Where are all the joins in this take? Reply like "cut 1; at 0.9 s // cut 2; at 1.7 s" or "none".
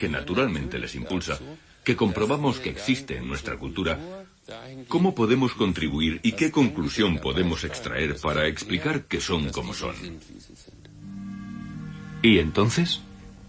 none